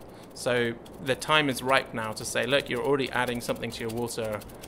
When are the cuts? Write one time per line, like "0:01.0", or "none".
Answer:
none